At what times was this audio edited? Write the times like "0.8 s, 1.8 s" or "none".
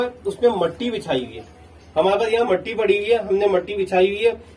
none